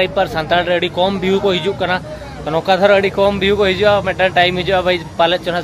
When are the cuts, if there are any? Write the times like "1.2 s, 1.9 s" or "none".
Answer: none